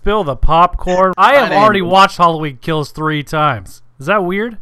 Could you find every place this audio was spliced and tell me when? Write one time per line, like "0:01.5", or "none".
0:01.1

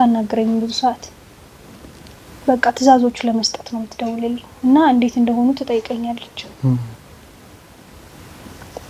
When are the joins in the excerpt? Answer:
none

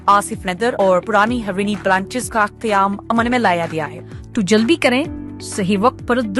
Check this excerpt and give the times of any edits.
0:04.0

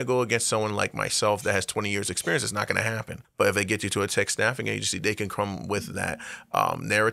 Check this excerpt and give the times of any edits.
0:03.2

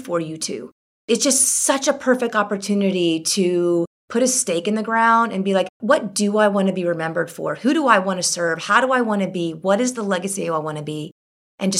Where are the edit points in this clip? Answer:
0:04.0
0:05.7

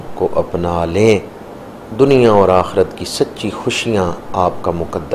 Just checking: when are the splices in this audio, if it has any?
none

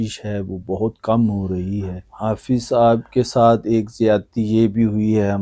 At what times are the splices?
0:02.0

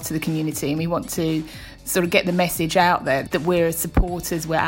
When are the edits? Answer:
0:03.2

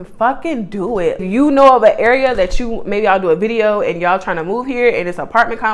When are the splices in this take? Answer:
0:01.2

